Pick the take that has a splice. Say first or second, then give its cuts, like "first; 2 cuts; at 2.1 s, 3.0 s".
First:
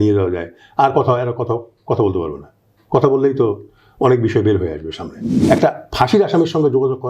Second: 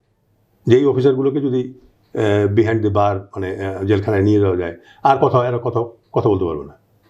first; 1 cut; at 5.3 s